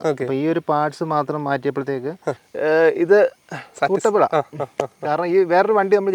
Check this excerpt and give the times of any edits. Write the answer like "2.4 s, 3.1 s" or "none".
2.5 s